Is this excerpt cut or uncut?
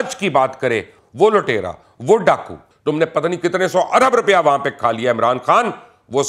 cut